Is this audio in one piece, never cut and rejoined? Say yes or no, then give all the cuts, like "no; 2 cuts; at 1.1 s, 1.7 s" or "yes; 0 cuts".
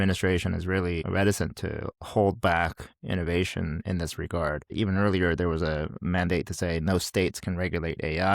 no; 2 cuts; at 1.0 s, 4.7 s